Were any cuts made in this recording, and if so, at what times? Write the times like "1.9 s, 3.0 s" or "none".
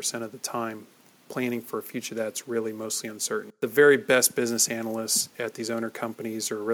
3.5 s

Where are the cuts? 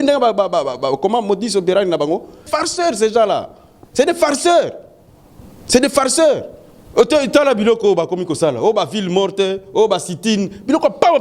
2.4 s

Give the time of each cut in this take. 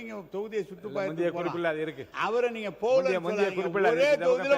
2.0 s

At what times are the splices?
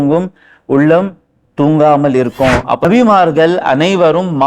2.8 s

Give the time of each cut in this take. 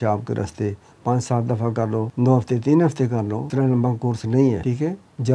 2.1 s, 3.4 s, 4.6 s

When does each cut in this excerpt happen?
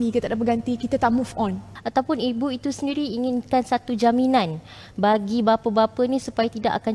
1.7 s

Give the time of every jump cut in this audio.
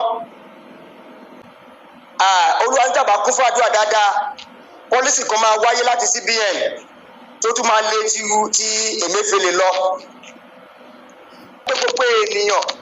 1.4 s, 11.7 s

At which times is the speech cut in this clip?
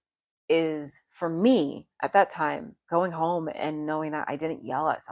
none

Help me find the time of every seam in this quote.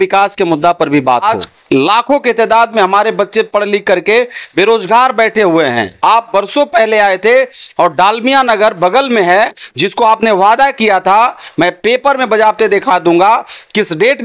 1.2 s

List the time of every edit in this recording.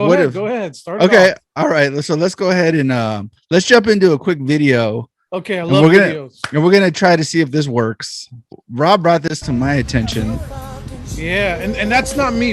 8.5 s

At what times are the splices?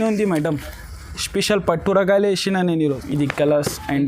2.8 s

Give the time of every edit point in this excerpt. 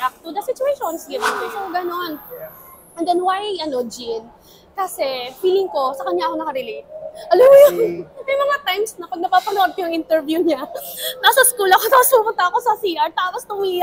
1.5 s

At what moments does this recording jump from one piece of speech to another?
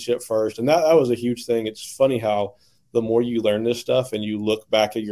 none

